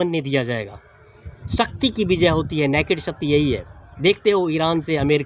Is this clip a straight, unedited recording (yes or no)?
yes